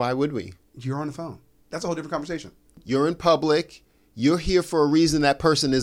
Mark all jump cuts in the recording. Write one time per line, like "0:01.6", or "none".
none